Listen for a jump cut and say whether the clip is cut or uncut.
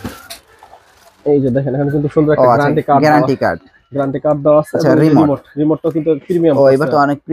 uncut